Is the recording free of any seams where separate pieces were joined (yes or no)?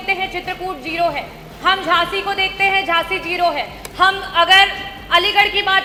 yes